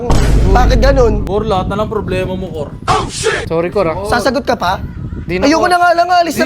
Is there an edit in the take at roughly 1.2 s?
yes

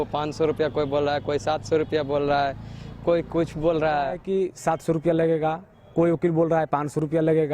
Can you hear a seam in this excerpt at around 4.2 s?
yes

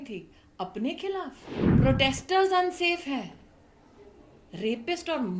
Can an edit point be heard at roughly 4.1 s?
no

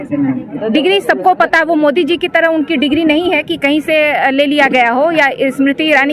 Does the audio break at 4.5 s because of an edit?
no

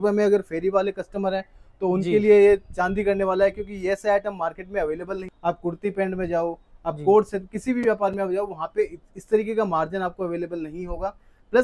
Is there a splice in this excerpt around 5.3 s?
yes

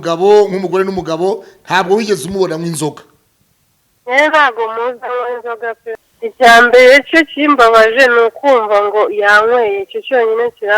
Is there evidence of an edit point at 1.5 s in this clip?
no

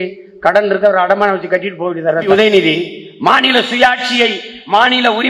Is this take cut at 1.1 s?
no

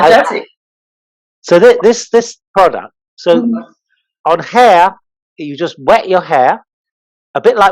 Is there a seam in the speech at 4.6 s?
no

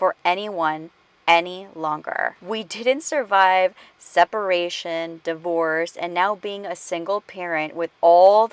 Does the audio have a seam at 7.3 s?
no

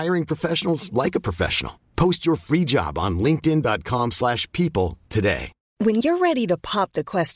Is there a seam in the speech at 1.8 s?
no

